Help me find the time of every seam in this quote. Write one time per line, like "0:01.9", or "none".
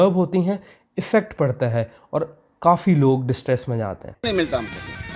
0:04.1